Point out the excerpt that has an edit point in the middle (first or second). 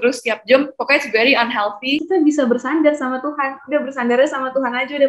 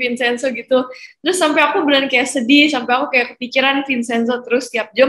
first